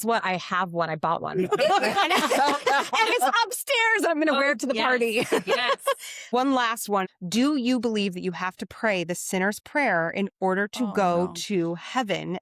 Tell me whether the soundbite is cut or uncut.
cut